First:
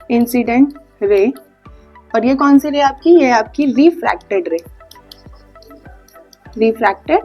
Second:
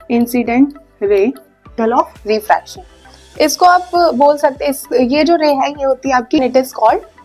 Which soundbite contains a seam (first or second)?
second